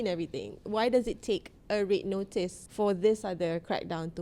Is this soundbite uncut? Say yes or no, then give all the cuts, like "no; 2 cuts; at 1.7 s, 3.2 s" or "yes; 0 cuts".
no; 1 cut; at 2.6 s